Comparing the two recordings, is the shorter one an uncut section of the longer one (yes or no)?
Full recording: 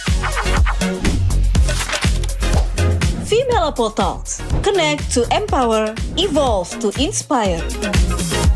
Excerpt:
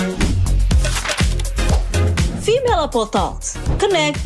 yes